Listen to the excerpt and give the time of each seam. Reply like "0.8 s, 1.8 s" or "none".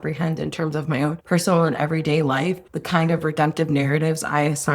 1.2 s, 2.7 s